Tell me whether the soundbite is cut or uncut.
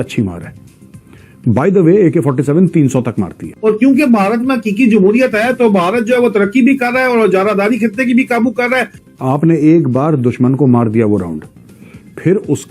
cut